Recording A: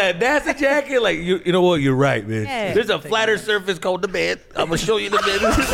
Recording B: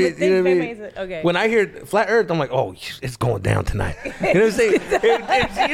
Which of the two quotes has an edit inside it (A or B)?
A